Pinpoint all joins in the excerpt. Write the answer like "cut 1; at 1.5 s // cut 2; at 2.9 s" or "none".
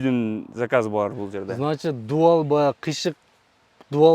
cut 1; at 1.5 s